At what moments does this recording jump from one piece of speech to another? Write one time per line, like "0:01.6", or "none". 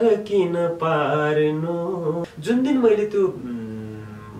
0:02.4